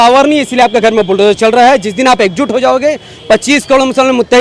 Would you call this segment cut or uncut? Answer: uncut